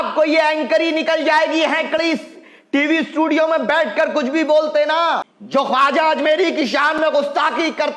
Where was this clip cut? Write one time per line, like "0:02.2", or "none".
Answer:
0:05.3